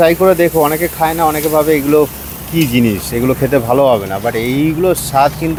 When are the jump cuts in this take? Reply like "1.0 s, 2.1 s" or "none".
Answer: none